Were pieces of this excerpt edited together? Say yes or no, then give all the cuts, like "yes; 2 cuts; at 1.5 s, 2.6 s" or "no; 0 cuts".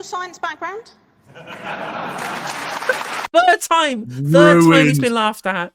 no; 0 cuts